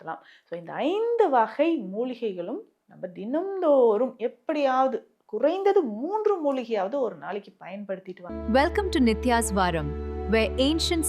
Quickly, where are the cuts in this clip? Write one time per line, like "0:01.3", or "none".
0:08.2